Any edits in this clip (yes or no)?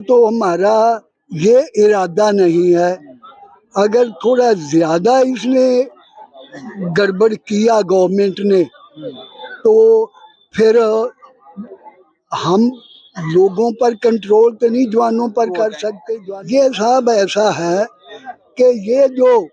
yes